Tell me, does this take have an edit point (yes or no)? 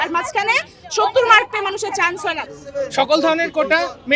yes